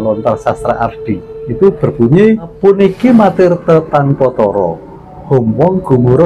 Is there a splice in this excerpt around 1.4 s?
yes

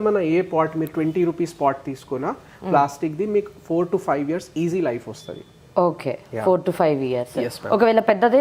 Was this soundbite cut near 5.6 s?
no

